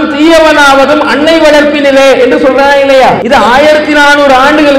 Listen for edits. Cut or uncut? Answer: cut